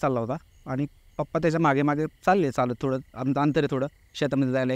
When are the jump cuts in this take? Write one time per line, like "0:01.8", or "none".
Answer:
none